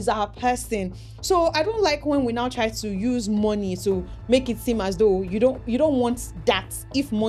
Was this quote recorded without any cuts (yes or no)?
yes